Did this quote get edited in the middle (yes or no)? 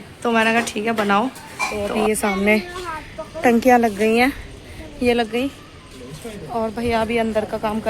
yes